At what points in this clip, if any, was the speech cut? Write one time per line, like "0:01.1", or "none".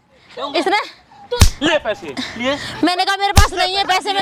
none